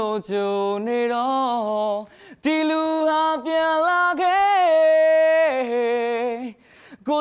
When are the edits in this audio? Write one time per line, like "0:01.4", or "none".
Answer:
0:06.0